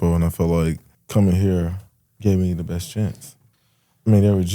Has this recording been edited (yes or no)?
yes